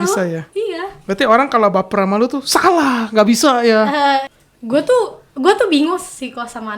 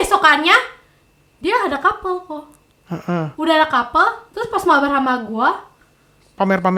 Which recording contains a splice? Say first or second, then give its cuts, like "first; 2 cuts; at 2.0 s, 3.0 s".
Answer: first; 1 cut; at 4.3 s